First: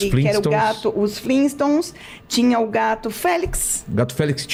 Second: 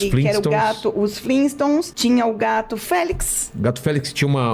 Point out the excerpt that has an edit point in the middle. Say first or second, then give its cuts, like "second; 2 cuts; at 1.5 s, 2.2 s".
second; 1 cut; at 1.9 s